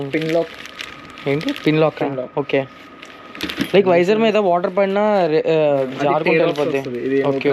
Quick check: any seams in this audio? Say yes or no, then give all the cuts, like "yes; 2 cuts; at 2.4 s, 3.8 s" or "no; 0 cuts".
no; 0 cuts